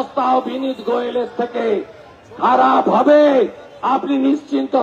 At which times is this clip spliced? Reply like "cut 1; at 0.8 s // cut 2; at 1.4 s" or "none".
none